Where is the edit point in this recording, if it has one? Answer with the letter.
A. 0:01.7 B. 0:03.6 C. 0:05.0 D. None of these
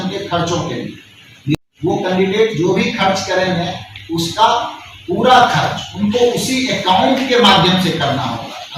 A